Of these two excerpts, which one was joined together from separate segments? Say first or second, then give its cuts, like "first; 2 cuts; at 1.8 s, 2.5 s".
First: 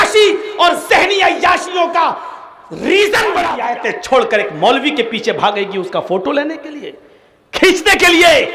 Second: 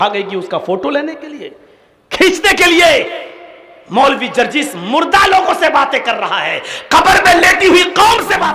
first; 1 cut; at 3.6 s